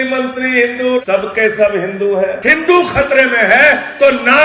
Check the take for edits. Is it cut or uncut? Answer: cut